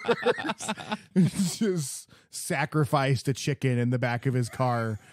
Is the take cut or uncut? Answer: cut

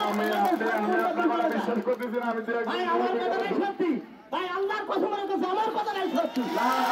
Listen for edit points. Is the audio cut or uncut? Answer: uncut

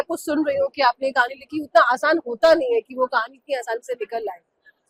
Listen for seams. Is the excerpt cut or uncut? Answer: uncut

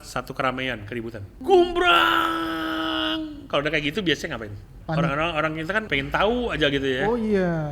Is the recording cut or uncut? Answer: cut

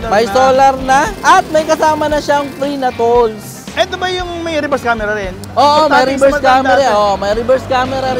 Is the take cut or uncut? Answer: cut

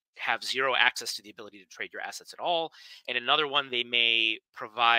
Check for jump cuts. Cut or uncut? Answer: uncut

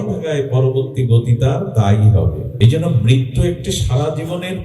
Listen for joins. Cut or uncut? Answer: cut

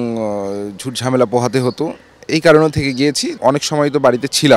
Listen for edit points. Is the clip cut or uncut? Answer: cut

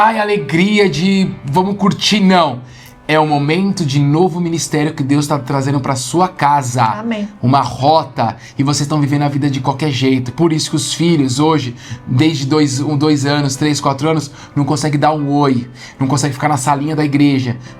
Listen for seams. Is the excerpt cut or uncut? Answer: uncut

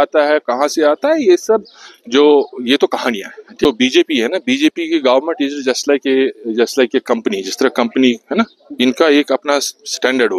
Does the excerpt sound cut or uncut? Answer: cut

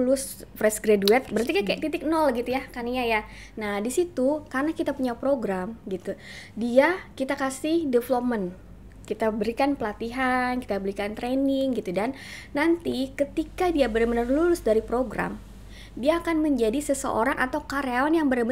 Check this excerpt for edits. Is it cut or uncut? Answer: uncut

